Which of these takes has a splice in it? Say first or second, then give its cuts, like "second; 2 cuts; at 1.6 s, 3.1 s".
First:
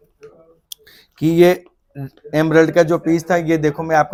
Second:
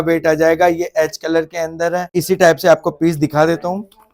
second; 1 cut; at 2.1 s